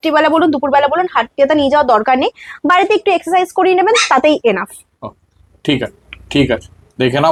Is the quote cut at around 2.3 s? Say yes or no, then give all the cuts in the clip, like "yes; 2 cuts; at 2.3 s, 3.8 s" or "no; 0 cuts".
no; 0 cuts